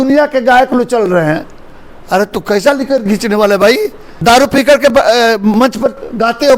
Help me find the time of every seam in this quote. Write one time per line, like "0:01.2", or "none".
0:04.1